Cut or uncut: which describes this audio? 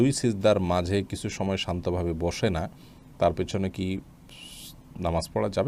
uncut